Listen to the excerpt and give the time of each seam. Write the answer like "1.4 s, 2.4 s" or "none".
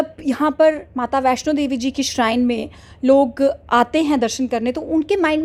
none

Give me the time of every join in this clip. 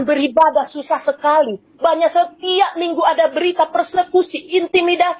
none

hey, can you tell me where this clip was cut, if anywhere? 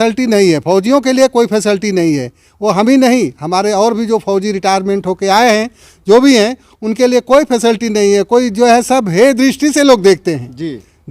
none

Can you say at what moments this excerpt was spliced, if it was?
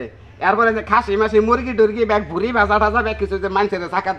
none

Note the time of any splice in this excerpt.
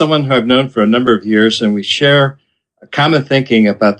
2.4 s

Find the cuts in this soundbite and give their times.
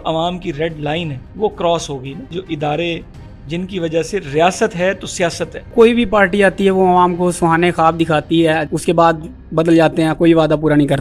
1.2 s, 2.3 s, 5.7 s, 8.6 s

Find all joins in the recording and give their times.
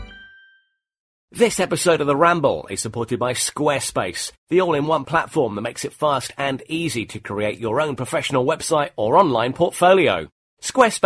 1.3 s

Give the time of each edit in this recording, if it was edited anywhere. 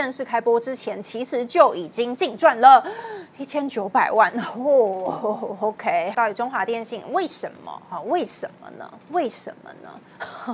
6.1 s

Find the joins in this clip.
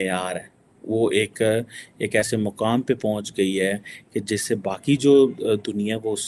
none

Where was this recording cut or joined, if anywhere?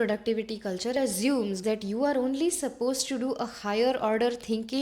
0.9 s

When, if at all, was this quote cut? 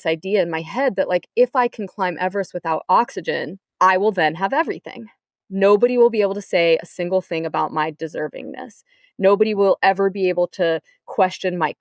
3.6 s

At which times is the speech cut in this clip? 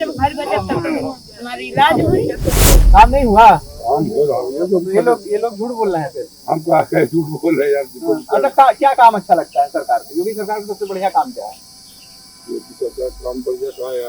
2.8 s

